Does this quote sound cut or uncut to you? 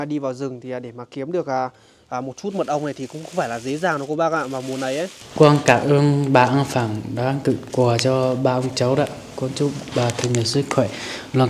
cut